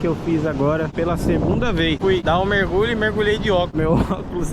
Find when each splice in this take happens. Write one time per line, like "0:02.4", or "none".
0:00.9
0:02.1
0:03.7